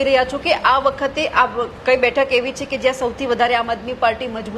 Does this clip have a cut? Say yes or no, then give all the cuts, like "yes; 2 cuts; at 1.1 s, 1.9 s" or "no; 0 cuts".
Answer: no; 0 cuts